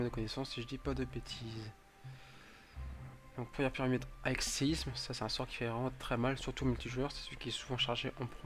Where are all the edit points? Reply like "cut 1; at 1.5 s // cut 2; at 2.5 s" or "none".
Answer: cut 1; at 4.1 s